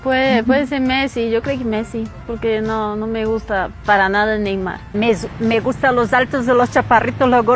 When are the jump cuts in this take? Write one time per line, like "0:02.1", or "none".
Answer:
0:04.8